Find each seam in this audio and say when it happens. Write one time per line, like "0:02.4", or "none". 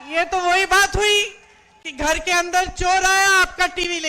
none